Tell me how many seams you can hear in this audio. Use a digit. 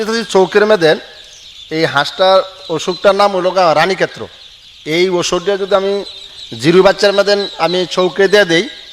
0